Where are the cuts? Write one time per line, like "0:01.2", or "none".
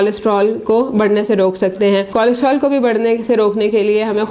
none